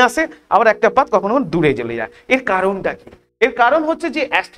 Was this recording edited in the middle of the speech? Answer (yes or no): no